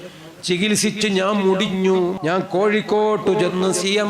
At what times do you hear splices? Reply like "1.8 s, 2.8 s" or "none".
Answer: 2.1 s